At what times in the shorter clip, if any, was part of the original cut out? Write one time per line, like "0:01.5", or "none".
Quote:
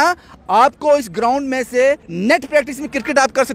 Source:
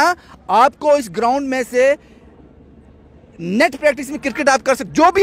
0:02.1